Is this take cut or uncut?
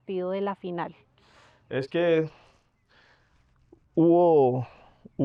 uncut